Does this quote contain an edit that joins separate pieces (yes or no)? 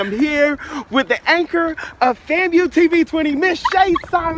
no